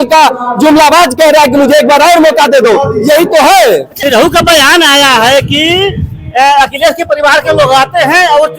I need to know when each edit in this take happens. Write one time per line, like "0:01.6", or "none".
0:04.0